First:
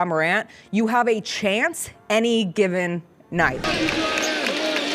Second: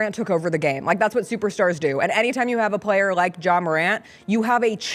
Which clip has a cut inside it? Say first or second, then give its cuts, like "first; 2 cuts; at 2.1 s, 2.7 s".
first; 1 cut; at 3.6 s